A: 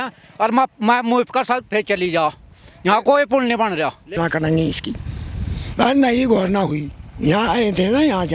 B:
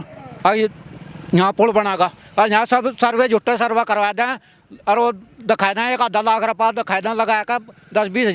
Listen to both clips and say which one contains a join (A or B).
A